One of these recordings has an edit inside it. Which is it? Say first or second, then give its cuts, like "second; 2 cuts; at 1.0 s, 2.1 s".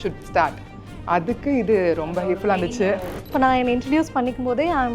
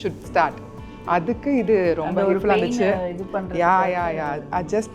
first; 1 cut; at 3.3 s